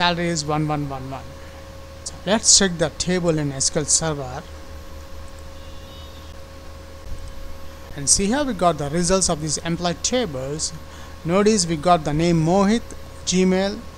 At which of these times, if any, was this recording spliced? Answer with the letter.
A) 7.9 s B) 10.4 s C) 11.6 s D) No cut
A